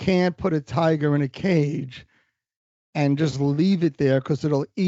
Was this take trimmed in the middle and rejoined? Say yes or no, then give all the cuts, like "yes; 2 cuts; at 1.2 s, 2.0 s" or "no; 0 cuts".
no; 0 cuts